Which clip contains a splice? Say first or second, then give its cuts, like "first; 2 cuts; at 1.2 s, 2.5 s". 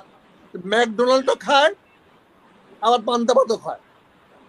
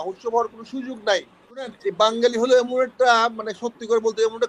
second; 1 cut; at 1.8 s